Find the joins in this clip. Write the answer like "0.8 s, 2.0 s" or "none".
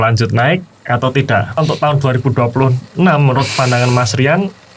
1.6 s